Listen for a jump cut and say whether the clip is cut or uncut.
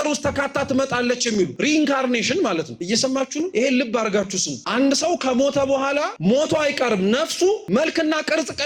cut